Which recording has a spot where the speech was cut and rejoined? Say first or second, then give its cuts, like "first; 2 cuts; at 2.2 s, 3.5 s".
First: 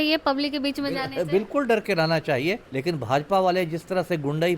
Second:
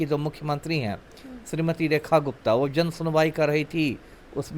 first; 1 cut; at 2.7 s